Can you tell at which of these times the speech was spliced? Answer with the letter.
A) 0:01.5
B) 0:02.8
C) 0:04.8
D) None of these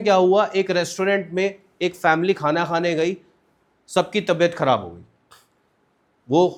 D